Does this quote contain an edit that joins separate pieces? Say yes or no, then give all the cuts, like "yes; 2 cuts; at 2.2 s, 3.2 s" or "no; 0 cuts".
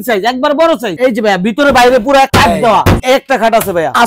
yes; 2 cuts; at 0.9 s, 3.0 s